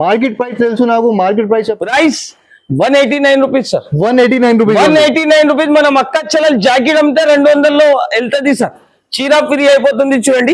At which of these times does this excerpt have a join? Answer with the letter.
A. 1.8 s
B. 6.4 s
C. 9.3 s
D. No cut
A